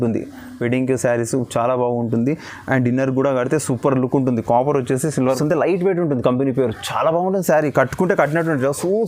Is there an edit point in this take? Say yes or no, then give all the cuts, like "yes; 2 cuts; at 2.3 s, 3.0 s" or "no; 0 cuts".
yes; 1 cut; at 5.4 s